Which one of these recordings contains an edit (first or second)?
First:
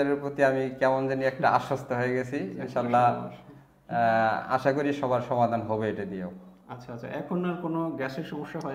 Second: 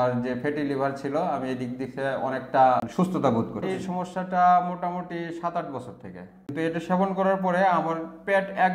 second